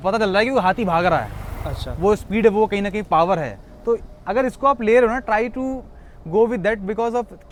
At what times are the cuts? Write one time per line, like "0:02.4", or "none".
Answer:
none

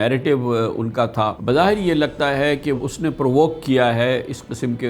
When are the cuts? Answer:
0:01.4
0:02.8

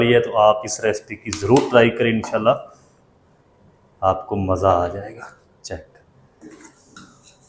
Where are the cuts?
none

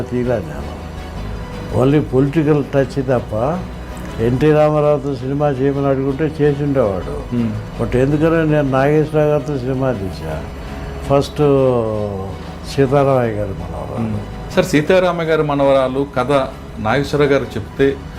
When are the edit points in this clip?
0:14.3

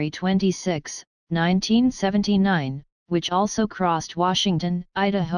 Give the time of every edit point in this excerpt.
0:02.8

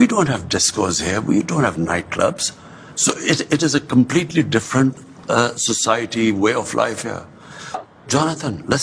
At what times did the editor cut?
0:07.8

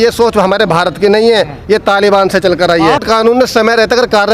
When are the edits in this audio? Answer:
0:03.0

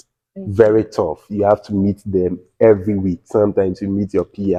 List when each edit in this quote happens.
none

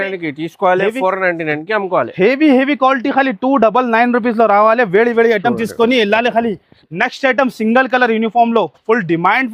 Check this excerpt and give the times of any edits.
none

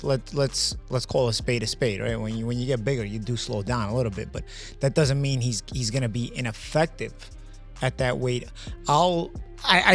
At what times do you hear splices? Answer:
none

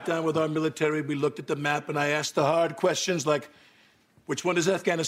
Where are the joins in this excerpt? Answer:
none

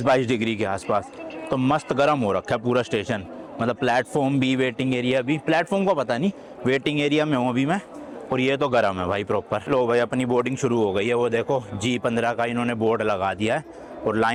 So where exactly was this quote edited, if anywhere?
none

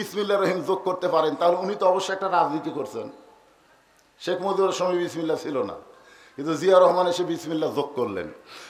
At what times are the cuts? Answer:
none

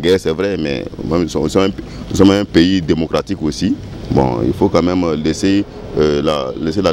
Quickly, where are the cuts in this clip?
none

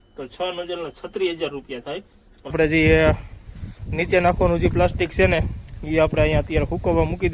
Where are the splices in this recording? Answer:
0:02.5

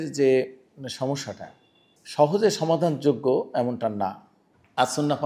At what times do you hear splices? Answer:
none

